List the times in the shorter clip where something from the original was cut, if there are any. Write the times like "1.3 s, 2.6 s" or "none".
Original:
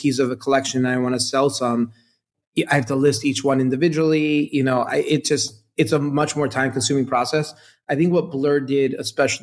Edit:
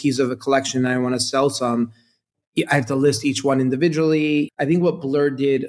4.5 s